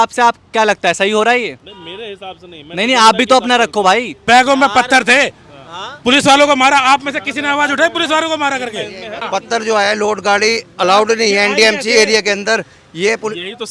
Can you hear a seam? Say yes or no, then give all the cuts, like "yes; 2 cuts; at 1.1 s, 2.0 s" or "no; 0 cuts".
yes; 2 cuts; at 4.2 s, 9.2 s